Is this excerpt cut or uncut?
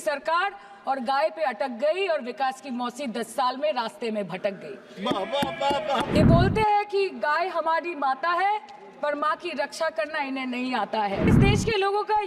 cut